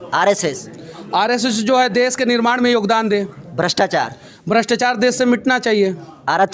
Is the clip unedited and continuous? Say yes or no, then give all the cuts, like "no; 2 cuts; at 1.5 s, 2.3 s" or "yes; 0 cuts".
yes; 0 cuts